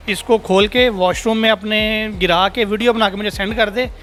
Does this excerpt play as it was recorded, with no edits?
yes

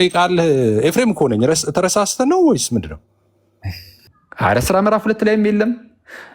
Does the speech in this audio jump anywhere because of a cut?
yes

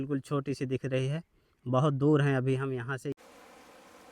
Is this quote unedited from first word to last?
no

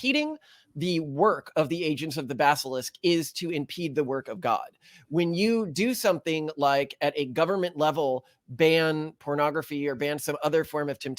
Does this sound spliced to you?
no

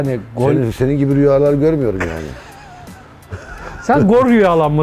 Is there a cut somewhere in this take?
no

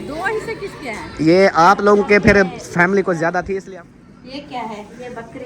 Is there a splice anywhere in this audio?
yes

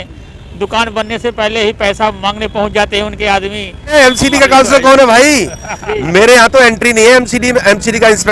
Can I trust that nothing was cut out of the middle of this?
no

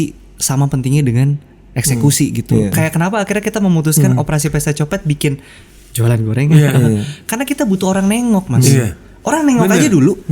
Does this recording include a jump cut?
yes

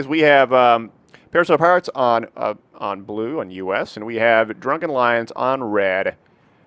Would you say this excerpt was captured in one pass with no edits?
yes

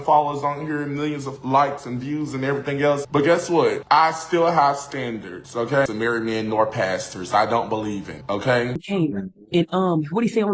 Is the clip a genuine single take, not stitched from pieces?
no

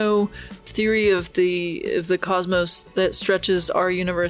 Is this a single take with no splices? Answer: yes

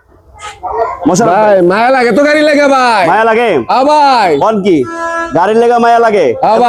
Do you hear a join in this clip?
no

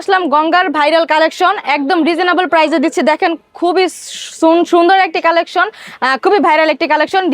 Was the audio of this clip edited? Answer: no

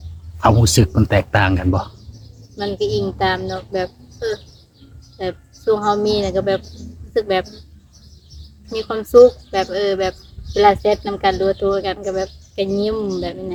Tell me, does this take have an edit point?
no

